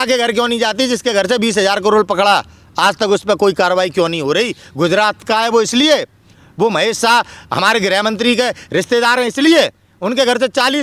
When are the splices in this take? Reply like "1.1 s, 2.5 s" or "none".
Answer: none